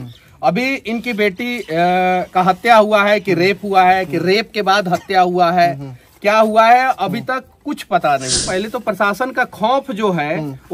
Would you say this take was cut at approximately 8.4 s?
yes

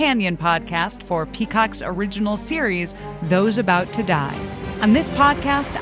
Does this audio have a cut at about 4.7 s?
yes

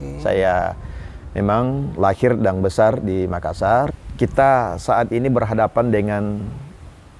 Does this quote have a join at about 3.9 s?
yes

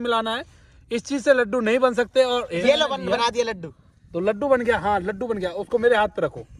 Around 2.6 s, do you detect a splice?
yes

